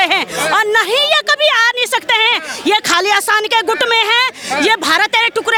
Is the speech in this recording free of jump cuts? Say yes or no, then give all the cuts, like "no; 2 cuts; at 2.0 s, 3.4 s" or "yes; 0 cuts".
yes; 0 cuts